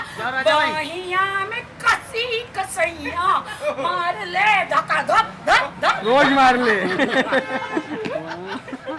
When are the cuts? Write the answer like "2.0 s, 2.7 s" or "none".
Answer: none